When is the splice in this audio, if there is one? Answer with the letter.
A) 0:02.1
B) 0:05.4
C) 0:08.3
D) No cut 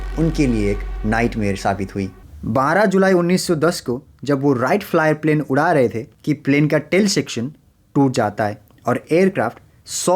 A